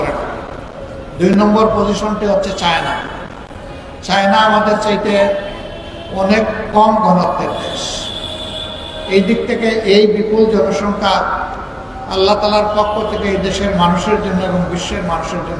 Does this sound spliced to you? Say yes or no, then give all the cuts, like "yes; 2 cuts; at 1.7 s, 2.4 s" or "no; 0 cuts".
no; 0 cuts